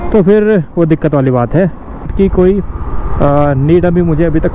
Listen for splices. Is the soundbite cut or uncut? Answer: cut